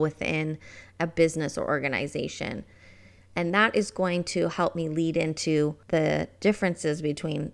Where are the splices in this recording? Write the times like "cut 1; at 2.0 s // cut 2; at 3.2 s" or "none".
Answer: cut 1; at 5.8 s

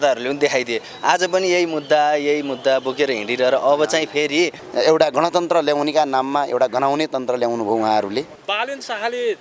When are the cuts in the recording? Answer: cut 1; at 4.6 s // cut 2; at 8.4 s

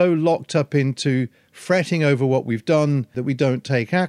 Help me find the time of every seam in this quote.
cut 1; at 3.2 s

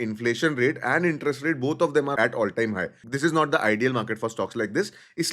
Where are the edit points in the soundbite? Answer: cut 1; at 2.1 s

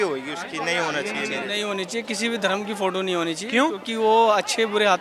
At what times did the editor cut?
cut 1; at 1.4 s

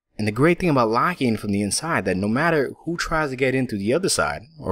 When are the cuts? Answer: cut 1; at 1.3 s

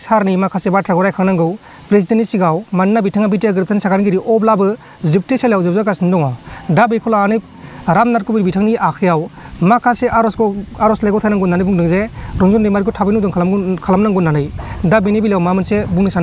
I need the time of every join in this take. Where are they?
none

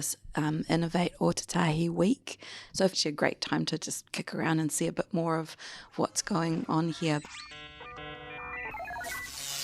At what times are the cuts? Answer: cut 1; at 2.6 s // cut 2; at 7.2 s

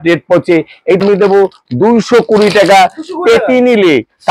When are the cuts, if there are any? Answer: cut 1; at 1.0 s

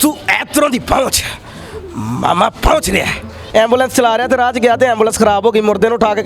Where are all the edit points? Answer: cut 1; at 3.4 s

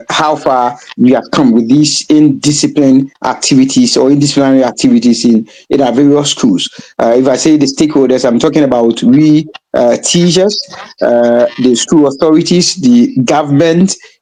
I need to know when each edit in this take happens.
none

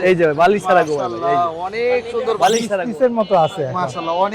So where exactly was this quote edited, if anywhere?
cut 1; at 2.8 s

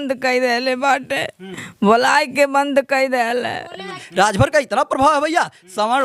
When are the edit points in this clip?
cut 1; at 4.0 s

